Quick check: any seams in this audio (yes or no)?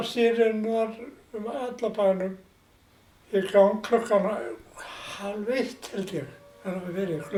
no